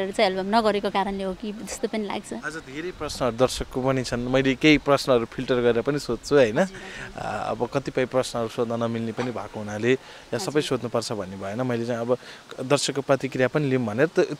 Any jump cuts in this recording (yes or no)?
no